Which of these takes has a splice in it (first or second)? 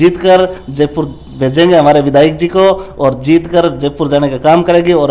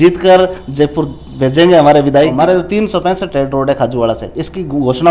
second